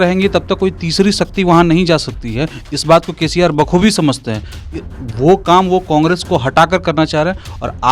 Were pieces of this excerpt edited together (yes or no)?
no